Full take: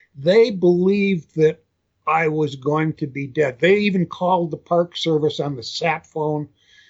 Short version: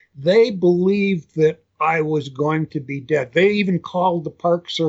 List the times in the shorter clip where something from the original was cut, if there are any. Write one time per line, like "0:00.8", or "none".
0:01.7

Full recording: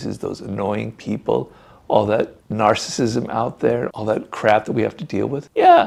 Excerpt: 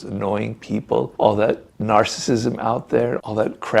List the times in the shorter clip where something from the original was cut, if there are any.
0:01.1

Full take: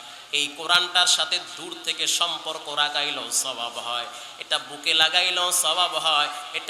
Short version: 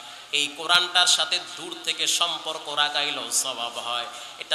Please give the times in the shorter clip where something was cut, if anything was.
none

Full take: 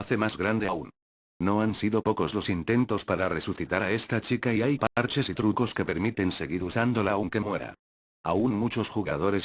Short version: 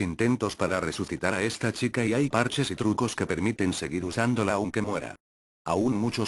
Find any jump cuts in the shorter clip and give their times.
0:02.4

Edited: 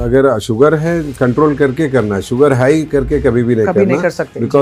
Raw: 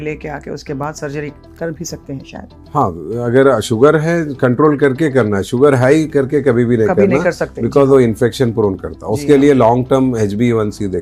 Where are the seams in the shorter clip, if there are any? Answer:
none

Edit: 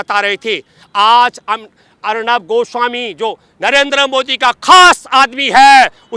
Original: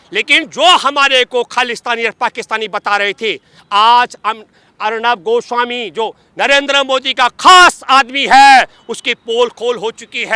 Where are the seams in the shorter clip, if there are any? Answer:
none

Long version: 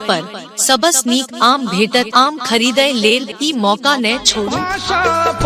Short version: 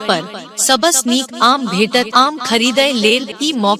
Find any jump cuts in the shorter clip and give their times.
none

